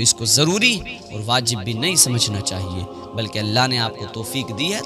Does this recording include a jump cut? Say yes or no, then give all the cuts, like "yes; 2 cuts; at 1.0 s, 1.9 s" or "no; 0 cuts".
no; 0 cuts